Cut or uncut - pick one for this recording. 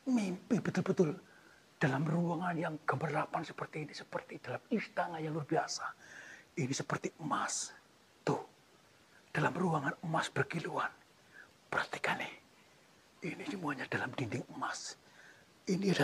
uncut